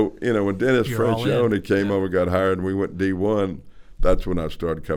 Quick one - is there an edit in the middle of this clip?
no; 0 cuts

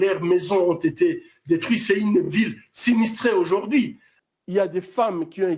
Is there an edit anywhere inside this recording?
yes; 1 cut; at 4.0 s

